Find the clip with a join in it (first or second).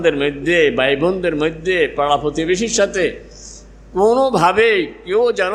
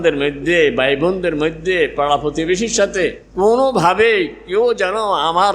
second